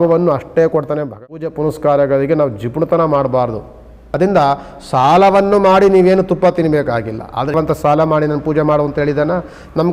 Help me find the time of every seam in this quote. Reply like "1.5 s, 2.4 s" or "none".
1.2 s, 4.2 s, 7.5 s